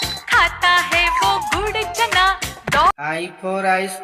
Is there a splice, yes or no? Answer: yes